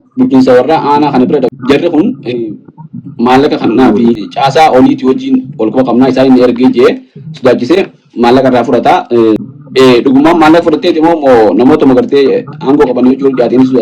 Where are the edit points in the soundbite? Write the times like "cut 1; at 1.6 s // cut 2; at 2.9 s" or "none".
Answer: cut 1; at 1.6 s // cut 2; at 4.3 s // cut 3; at 9.4 s